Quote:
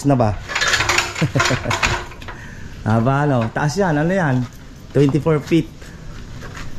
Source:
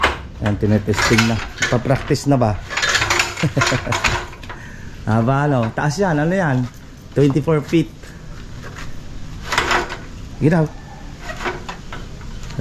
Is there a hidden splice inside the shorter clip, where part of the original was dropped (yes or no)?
no